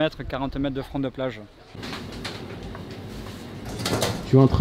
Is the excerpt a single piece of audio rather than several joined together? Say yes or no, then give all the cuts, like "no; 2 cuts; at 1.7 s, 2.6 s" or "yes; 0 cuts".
no; 1 cut; at 1.8 s